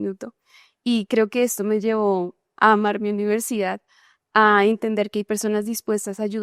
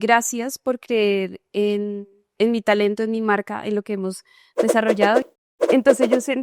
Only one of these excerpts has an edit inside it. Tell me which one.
second; 1 cut; at 5.3 s

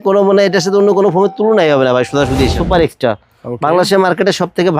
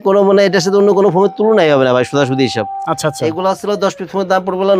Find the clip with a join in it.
first; 1 cut; at 2.5 s

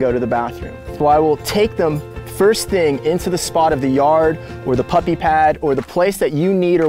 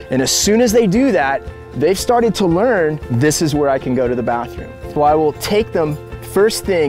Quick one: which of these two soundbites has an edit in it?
second; 1 cut; at 0.9 s

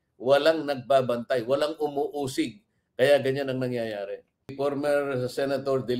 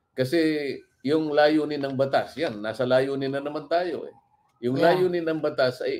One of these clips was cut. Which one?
first; 1 cut; at 4.5 s

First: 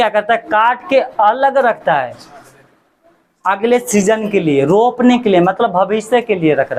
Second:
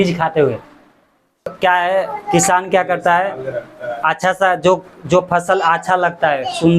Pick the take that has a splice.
second; 1 cut; at 1.5 s

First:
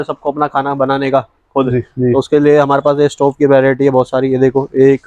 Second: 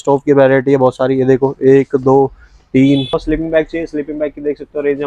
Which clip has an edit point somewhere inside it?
second; 1 cut; at 3.2 s

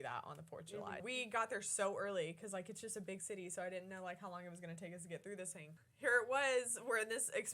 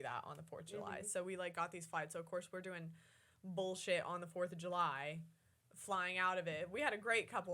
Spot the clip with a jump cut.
first; 2 cuts; at 1.0 s, 5.8 s

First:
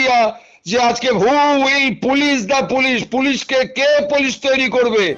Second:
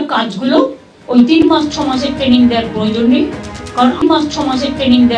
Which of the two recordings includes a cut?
second; 2 cuts; at 1.4 s, 4.0 s

